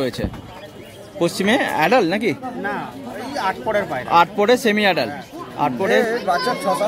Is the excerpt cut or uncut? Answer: cut